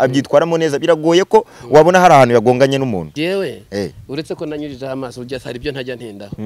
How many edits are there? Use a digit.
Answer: 1